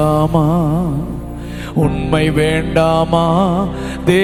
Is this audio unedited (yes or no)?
yes